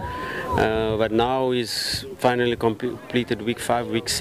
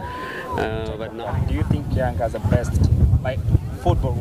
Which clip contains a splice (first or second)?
second